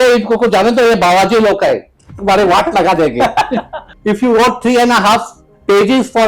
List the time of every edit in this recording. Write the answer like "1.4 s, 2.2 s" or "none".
3.9 s

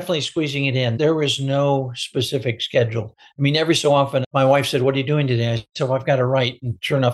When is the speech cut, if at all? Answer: 0.9 s, 4.2 s

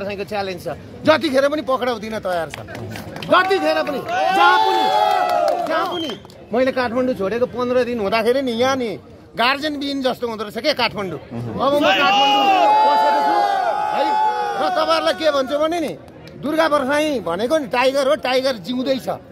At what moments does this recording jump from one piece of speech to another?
6.3 s

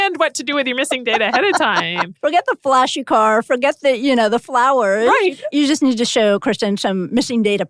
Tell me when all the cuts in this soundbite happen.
2.1 s

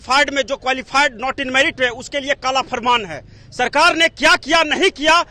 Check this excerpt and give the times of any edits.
none

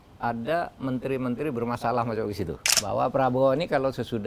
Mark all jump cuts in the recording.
2.6 s

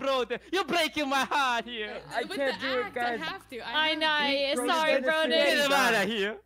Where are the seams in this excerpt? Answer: 2.0 s

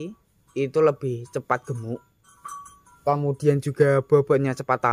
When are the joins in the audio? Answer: none

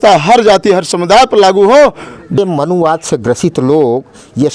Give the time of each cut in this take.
2.4 s

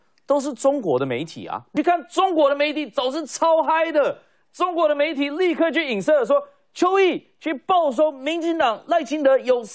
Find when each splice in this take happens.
1.7 s

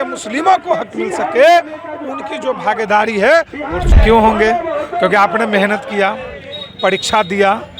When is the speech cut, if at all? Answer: 3.9 s

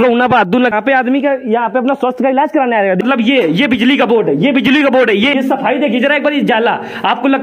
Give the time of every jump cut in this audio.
0.7 s, 3.0 s, 5.3 s

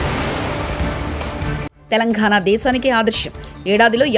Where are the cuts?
1.7 s

